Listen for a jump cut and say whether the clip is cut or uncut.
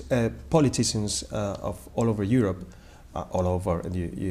uncut